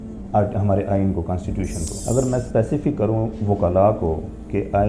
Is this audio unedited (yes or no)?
no